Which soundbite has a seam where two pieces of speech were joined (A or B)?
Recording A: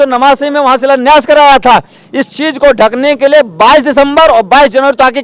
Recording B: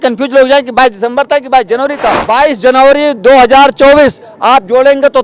B